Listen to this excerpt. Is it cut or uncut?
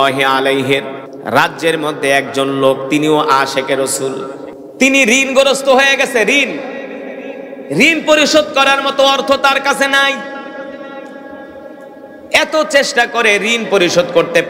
cut